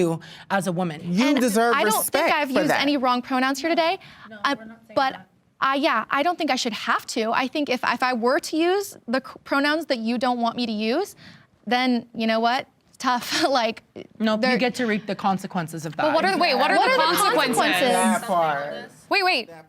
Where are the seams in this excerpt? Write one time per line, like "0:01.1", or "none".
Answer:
0:01.0

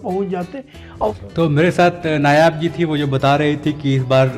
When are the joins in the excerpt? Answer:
0:01.1

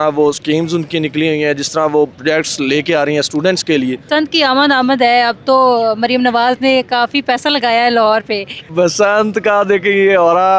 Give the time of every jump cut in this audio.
0:02.1
0:04.0
0:08.6

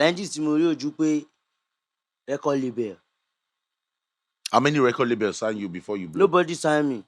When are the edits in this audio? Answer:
none

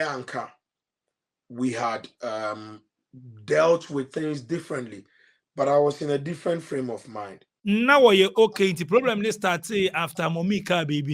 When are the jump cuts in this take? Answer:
0:07.5

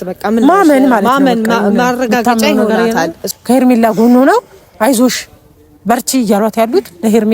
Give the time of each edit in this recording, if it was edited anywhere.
0:03.2

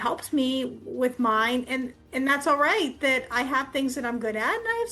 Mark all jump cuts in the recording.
none

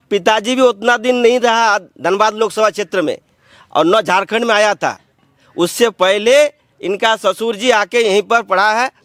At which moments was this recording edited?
none

